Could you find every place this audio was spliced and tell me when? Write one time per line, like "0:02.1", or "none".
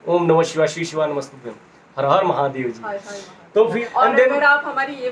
0:03.8